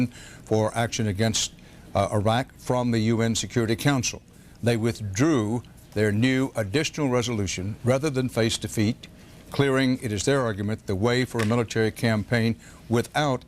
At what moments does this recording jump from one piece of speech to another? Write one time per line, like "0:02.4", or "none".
0:05.5